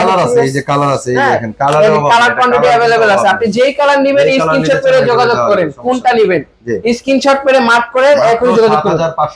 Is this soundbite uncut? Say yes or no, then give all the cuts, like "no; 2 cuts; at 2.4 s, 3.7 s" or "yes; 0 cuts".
yes; 0 cuts